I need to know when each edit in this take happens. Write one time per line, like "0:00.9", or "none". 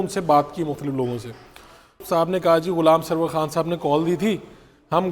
0:02.0